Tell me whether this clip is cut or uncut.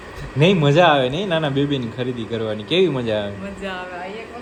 uncut